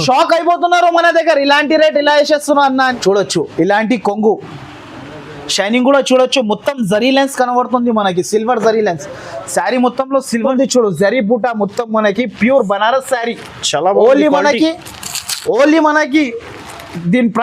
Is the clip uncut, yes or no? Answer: no